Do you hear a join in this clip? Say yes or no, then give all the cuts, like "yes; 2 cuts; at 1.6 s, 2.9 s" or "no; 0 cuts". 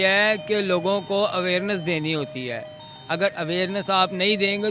no; 0 cuts